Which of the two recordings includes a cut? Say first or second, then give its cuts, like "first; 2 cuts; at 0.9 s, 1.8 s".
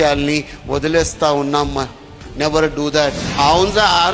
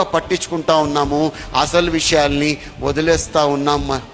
first; 1 cut; at 3.2 s